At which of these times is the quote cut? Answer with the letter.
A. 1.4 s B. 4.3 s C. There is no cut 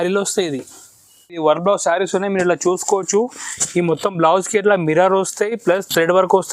A